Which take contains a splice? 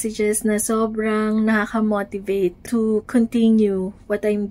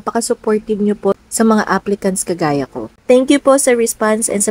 second; 1 cut; at 3.0 s

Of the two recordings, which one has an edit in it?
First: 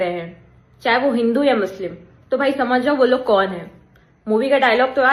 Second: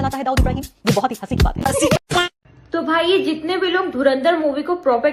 second; 1 cut; at 2.0 s

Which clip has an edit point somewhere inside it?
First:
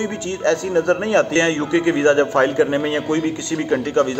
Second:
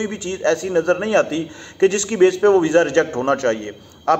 first; 1 cut; at 1.3 s

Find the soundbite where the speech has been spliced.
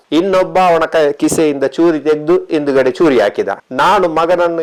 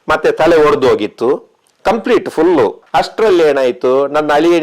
second; 1 cut; at 2.9 s

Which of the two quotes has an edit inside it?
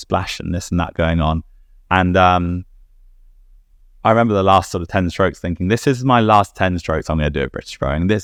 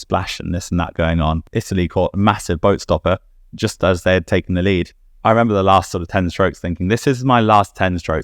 second; 2 cuts; at 1.5 s, 5.0 s

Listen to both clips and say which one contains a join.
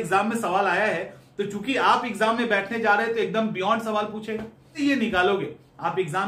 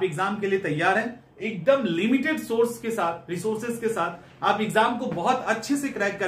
first; 1 cut; at 4.7 s

